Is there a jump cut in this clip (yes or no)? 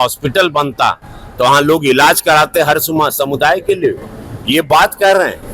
no